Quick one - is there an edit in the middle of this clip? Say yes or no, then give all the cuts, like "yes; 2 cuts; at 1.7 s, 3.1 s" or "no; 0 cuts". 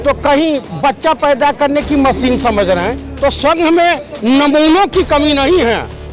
yes; 1 cut; at 3.0 s